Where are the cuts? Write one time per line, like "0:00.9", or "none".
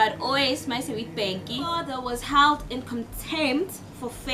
0:01.9

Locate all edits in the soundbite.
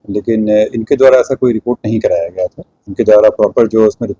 0:02.7

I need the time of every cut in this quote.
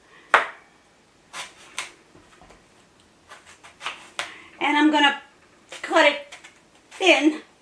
none

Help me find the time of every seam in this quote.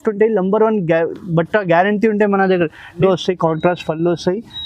0:03.0

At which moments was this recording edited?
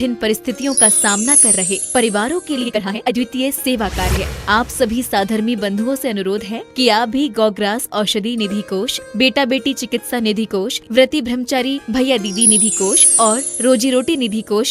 0:02.9

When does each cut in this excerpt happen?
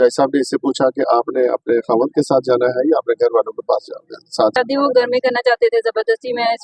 0:04.5

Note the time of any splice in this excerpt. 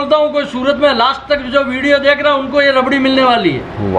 none

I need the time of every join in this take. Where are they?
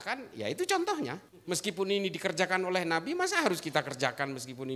0:01.3

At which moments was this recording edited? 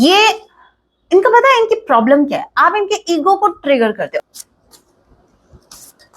0:04.2

